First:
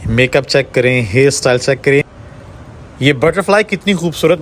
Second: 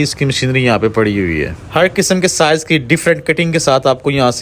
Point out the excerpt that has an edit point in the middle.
second; 1 cut; at 1.6 s

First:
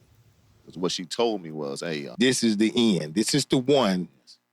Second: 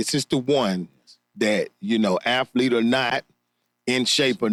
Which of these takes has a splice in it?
first; 1 cut; at 2.1 s

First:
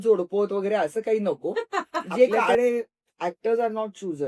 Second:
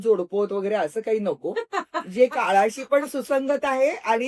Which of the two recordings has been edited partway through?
first; 1 cut; at 2.4 s

